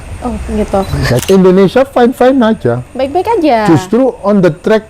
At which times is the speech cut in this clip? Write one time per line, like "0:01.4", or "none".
0:01.2